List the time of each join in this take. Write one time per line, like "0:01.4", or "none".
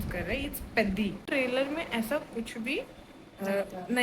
0:01.3